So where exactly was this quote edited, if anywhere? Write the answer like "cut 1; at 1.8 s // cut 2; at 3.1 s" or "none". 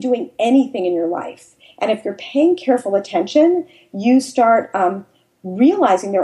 none